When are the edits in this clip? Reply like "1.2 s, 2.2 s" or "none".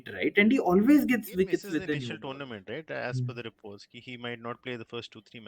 2.2 s